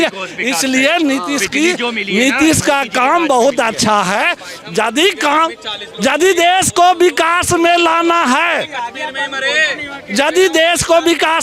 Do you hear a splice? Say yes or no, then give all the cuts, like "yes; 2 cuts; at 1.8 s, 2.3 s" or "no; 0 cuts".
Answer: no; 0 cuts